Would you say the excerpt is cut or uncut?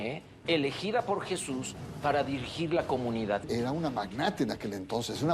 cut